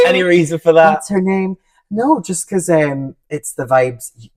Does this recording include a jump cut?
no; 0 cuts

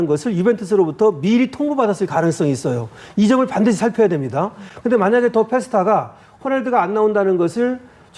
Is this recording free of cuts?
yes; 0 cuts

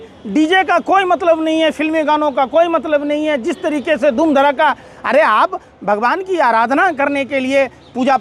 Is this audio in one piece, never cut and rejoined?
yes; 0 cuts

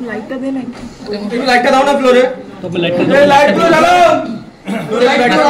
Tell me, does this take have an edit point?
no; 0 cuts

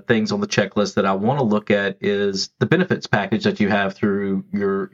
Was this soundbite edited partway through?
no; 0 cuts

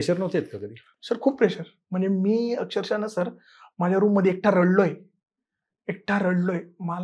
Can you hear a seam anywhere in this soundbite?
no; 0 cuts

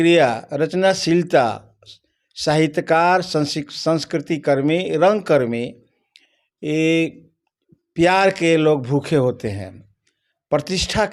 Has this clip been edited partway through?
no; 0 cuts

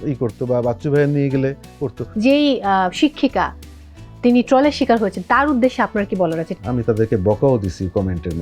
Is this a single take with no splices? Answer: no; 2 cuts; at 2.0 s, 6.5 s

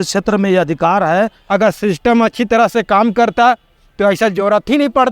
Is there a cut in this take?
yes; 1 cut; at 1.4 s

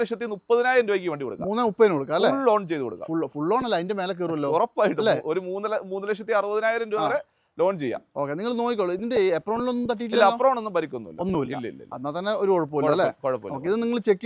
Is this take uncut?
yes; 0 cuts

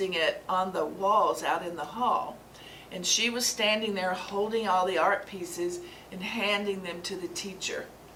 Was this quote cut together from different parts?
no; 0 cuts

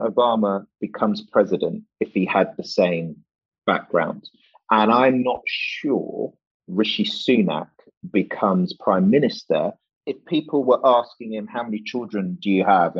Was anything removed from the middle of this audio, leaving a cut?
yes; 2 cuts; at 3.2 s, 9.8 s

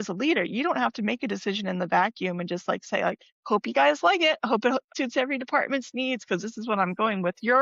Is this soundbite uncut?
no; 2 cuts; at 3.4 s, 4.9 s

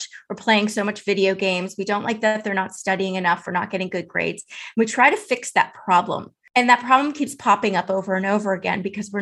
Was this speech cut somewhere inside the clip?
yes; 1 cut; at 6.4 s

